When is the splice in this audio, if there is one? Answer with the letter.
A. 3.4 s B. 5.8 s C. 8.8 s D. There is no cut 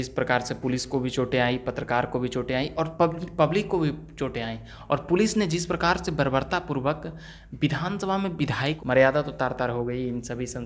C